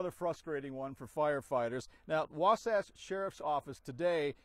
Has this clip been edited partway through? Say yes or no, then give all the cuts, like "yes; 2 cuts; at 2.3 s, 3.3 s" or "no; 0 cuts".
no; 0 cuts